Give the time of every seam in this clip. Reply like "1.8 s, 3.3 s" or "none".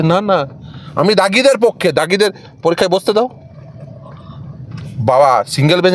none